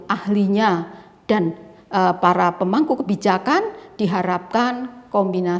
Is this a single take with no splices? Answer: yes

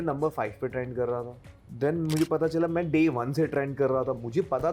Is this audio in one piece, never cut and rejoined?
yes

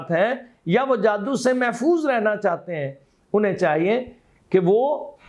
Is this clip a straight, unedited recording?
yes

